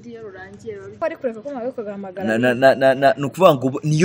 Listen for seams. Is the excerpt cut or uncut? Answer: cut